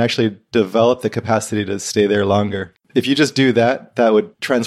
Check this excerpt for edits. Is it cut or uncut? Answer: cut